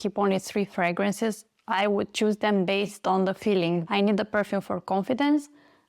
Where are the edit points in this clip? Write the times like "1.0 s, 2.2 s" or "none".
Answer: 3.8 s

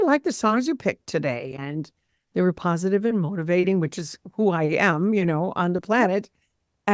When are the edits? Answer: none

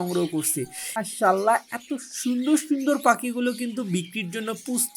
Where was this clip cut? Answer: 1.0 s

